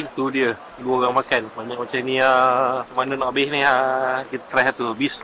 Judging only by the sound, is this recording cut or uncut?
cut